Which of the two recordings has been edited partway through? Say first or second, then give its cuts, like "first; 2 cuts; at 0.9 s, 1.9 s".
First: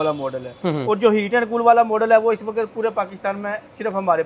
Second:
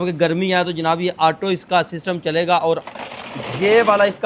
second; 1 cut; at 2.8 s